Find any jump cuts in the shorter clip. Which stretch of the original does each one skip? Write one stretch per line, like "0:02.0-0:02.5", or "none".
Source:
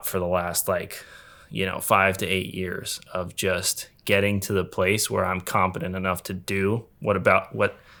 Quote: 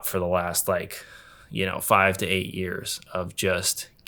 none